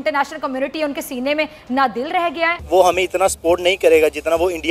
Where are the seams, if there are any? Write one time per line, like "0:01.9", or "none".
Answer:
0:02.6